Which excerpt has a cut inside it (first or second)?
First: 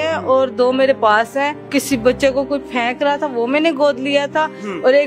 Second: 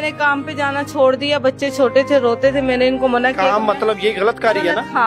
first